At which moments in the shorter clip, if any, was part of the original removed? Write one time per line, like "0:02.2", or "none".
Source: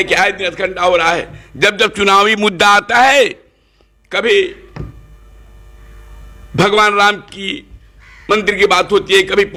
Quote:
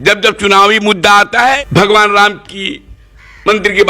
0:01.6